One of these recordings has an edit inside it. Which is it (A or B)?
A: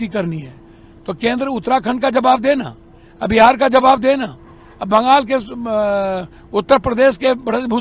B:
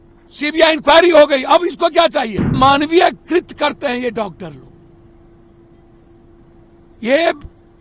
B